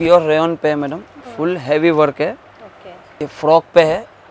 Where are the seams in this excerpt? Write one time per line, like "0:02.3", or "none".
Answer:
0:02.5

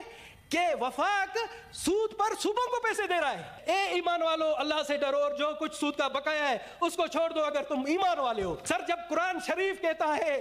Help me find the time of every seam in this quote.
0:03.5
0:08.6

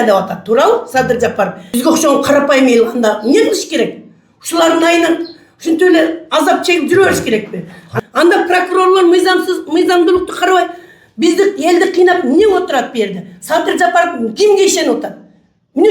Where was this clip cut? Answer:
0:01.6
0:07.9

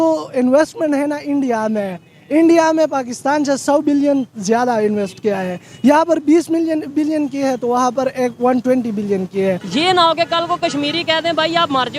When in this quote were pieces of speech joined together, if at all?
0:09.6

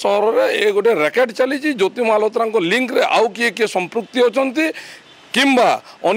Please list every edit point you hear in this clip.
none

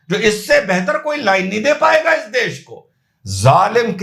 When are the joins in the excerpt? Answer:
none

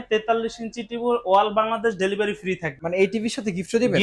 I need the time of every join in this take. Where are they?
0:02.7

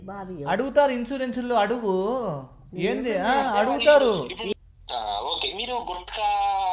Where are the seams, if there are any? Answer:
0:04.5

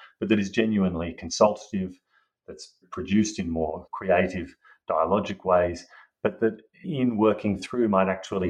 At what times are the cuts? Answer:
0:02.8
0:03.9
0:06.9

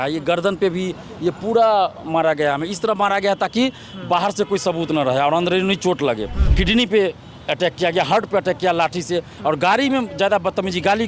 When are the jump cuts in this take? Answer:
0:06.4

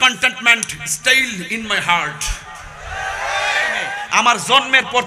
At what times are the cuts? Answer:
0:03.9

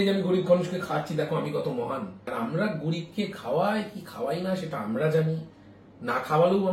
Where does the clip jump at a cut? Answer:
0:02.3

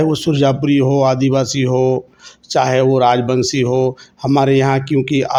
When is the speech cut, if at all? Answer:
none

